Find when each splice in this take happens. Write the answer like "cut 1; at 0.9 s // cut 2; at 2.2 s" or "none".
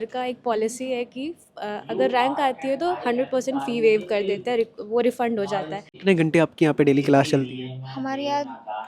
cut 1; at 5.9 s